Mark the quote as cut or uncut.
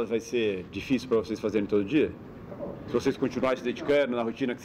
uncut